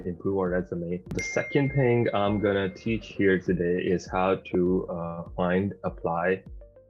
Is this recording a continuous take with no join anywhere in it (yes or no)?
no